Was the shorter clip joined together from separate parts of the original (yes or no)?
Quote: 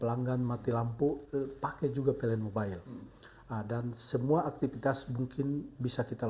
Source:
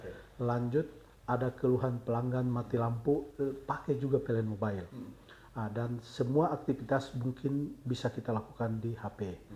no